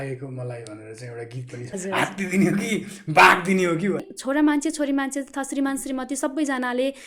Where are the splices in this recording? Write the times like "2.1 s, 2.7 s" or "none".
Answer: 1.7 s, 4.0 s